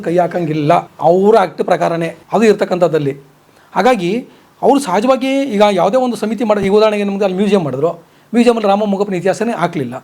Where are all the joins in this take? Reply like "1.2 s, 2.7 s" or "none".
none